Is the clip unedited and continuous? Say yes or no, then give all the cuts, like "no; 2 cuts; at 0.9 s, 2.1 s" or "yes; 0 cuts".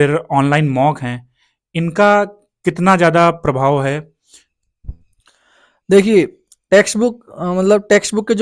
yes; 0 cuts